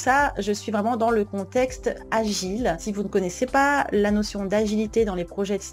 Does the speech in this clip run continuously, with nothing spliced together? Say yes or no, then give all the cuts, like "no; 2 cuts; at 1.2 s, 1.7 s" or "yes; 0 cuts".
no; 1 cut; at 2.8 s